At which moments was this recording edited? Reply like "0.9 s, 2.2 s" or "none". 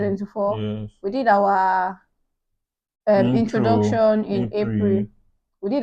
none